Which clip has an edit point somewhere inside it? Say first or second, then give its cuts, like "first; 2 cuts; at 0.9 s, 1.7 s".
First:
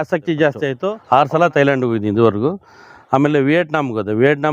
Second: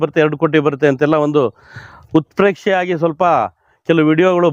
first; 1 cut; at 0.9 s